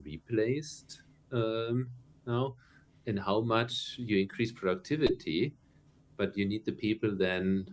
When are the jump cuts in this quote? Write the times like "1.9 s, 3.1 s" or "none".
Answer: none

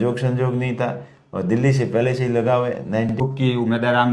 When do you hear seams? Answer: 3.2 s

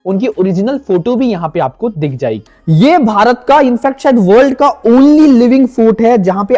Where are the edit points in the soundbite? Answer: 2.5 s

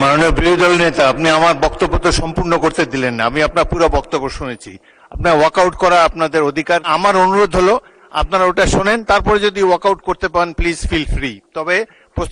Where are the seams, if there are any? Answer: 6.9 s

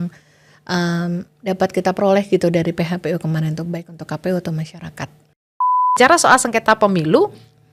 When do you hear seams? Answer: 5.8 s

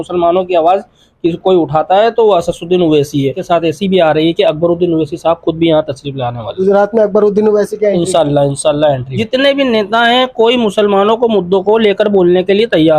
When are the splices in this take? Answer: 3.4 s, 9.1 s

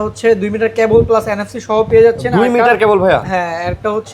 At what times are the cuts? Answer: none

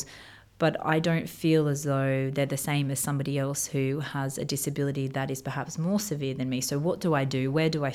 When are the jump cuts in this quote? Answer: none

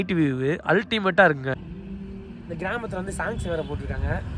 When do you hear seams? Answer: 1.5 s

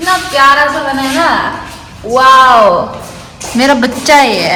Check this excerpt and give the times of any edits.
none

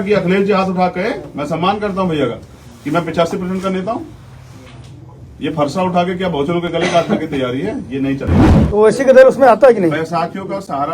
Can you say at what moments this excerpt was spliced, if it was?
8.5 s

